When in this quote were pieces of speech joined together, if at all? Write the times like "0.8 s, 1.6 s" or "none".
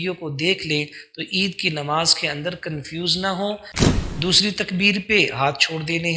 3.8 s